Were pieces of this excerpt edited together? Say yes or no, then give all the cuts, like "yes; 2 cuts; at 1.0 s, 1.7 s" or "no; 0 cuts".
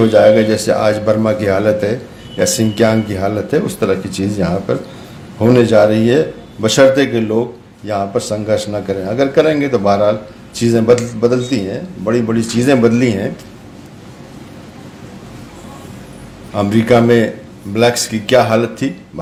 no; 0 cuts